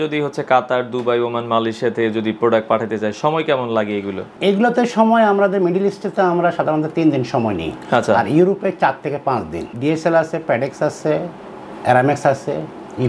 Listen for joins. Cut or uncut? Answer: cut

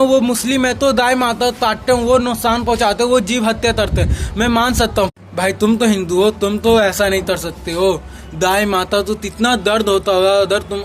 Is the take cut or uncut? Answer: cut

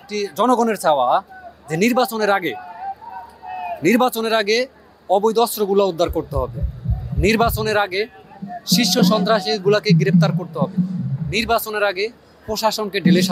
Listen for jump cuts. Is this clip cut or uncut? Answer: uncut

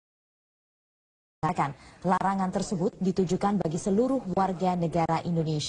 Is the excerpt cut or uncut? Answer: uncut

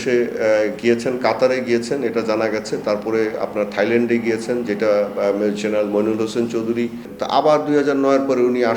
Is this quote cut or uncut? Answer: cut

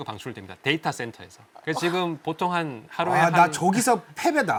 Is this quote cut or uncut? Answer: uncut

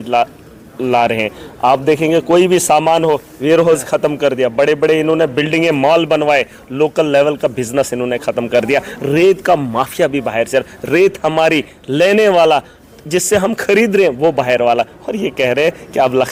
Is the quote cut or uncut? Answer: uncut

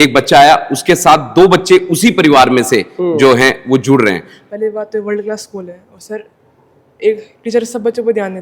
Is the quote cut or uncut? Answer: cut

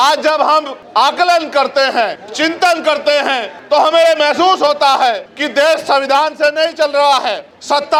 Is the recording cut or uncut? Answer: uncut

